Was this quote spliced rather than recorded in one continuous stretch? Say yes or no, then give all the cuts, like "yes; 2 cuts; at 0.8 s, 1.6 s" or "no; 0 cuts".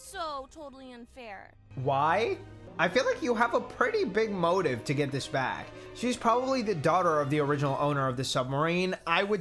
yes; 2 cuts; at 1.6 s, 2.6 s